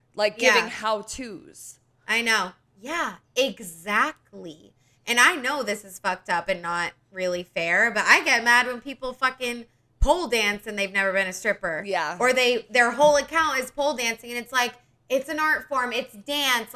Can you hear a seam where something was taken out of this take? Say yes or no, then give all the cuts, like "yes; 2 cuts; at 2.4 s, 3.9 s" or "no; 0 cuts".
no; 0 cuts